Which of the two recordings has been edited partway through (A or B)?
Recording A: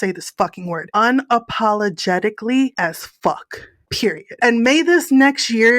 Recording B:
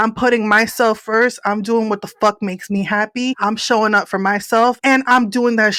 A